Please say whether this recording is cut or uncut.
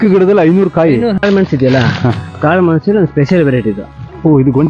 cut